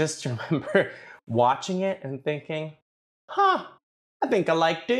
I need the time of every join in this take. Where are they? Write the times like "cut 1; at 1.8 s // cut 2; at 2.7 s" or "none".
none

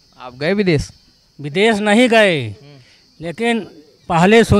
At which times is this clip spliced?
none

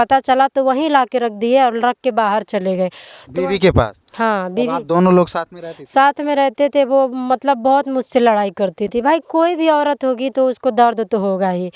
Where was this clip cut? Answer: none

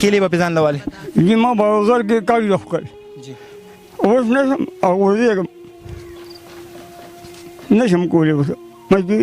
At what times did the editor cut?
cut 1; at 0.9 s

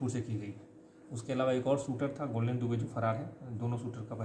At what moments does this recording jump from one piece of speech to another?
none

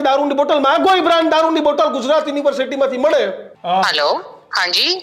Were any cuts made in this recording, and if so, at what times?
cut 1; at 3.5 s

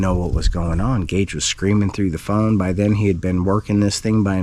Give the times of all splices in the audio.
none

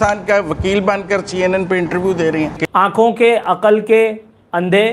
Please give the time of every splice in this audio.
cut 1; at 2.6 s

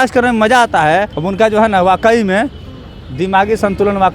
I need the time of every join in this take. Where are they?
cut 1; at 1.2 s

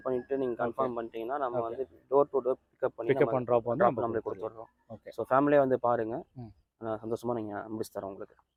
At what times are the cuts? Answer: none

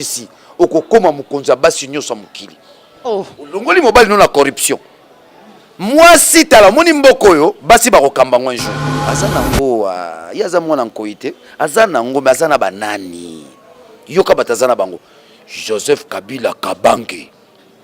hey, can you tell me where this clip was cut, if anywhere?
cut 1; at 8.9 s

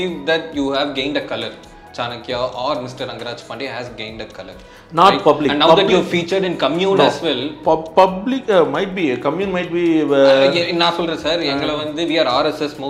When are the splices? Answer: none

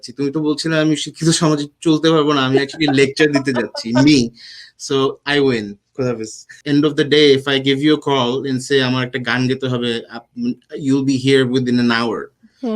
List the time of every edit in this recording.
cut 1; at 6.6 s

